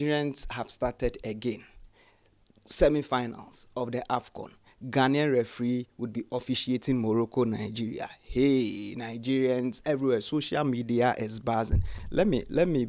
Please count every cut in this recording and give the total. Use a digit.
0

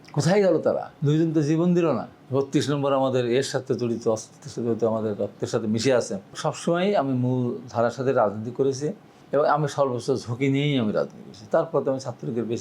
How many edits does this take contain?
3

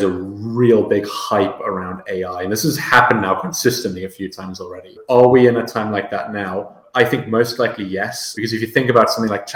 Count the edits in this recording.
3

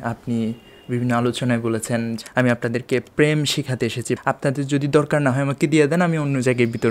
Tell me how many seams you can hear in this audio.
2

